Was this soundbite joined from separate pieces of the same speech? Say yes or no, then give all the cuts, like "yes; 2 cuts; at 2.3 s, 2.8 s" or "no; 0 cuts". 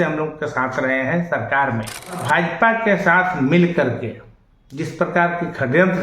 yes; 1 cut; at 2.2 s